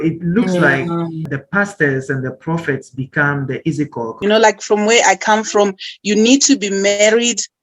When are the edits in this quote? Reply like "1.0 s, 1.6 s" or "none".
1.2 s, 4.0 s